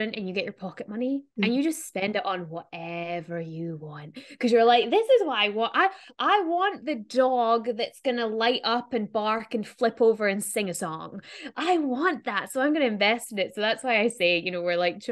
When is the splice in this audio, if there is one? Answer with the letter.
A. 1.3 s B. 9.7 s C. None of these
A